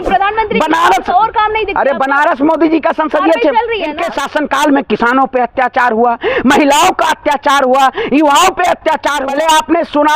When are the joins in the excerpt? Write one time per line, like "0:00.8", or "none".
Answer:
0:03.9
0:09.2

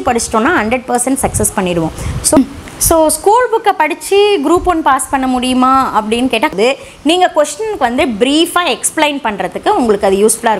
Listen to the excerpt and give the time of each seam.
0:02.4
0:06.5

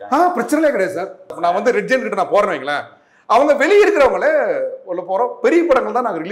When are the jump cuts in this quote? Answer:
0:01.3

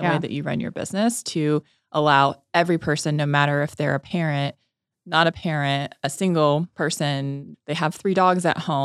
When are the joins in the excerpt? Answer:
0:07.2

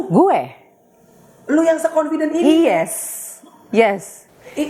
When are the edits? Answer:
none

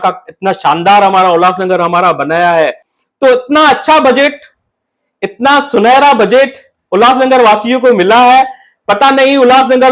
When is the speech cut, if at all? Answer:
0:02.9

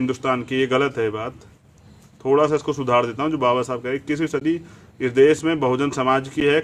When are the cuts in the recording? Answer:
none

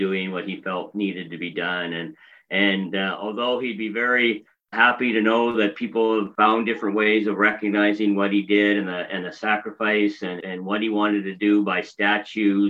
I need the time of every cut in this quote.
0:04.7
0:06.3
0:10.4

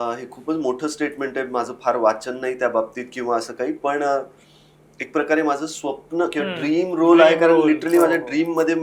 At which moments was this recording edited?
none

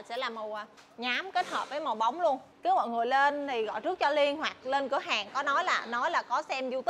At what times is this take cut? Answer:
0:02.5

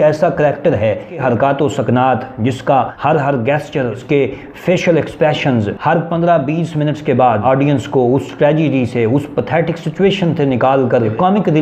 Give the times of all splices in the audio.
0:01.2
0:02.9
0:04.0
0:07.4

